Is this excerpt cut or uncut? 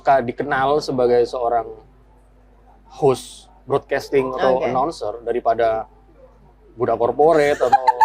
uncut